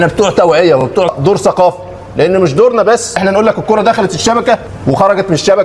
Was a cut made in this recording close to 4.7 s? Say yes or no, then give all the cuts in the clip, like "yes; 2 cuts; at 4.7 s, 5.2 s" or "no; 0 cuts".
yes; 3 cuts; at 1.0 s, 3.2 s, 4.7 s